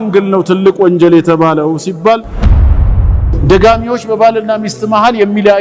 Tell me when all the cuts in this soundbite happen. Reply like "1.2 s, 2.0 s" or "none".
2.8 s